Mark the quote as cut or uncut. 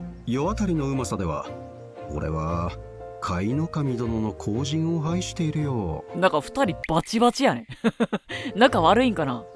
uncut